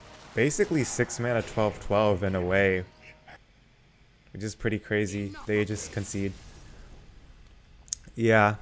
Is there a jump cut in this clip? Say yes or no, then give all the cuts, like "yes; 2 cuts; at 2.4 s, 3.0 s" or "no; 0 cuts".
no; 0 cuts